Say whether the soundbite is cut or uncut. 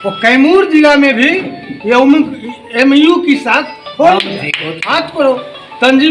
cut